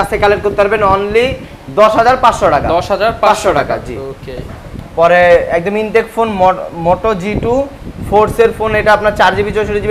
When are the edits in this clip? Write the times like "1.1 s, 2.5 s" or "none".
none